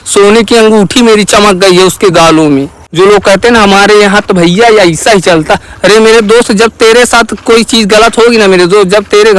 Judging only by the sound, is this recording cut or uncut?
cut